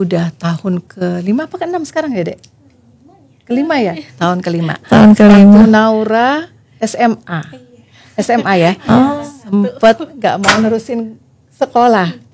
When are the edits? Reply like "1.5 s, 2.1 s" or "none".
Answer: none